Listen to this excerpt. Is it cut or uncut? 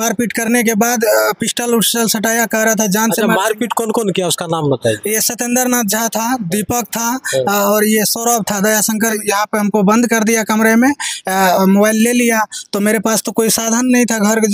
cut